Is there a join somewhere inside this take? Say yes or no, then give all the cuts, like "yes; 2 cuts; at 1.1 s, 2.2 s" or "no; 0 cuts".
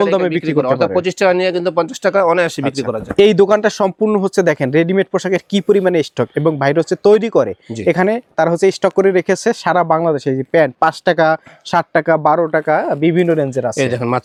no; 0 cuts